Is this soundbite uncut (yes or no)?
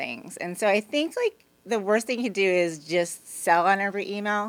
yes